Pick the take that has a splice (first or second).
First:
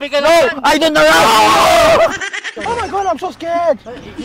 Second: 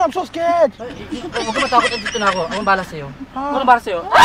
first